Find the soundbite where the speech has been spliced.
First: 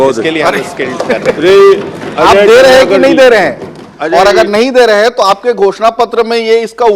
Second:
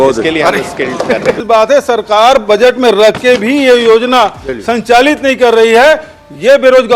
second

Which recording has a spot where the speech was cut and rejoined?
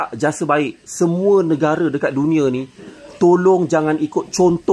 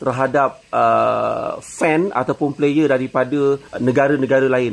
second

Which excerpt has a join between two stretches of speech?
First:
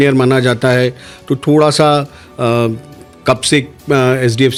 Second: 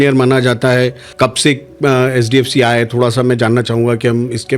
second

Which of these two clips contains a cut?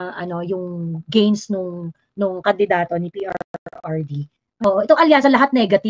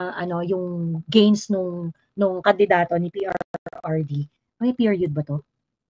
first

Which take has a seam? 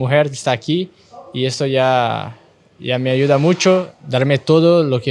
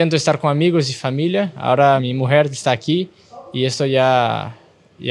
first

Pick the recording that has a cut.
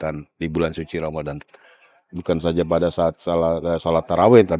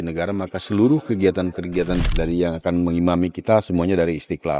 second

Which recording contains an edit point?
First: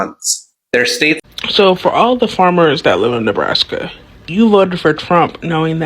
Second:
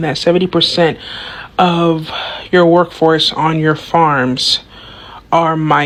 first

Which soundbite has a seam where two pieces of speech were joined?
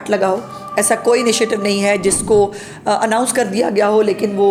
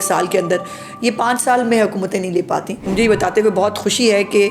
second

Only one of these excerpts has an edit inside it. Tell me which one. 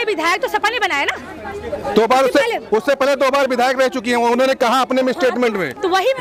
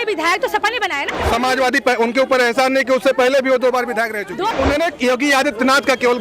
second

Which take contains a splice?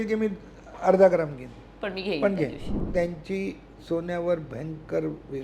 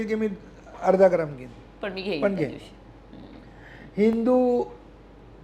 first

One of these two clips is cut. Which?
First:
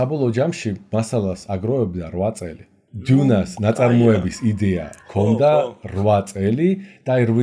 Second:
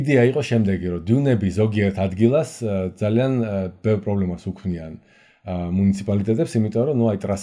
first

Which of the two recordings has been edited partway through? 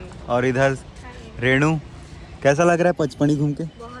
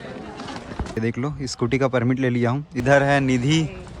second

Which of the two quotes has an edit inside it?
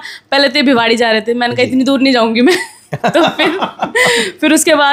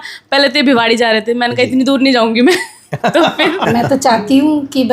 second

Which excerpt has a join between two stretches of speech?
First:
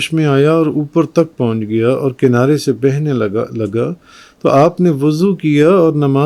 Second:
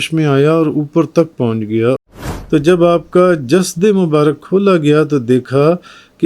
second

